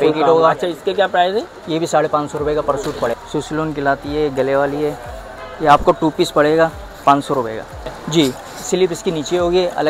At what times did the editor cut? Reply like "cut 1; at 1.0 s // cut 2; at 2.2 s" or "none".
cut 1; at 3.1 s // cut 2; at 8.0 s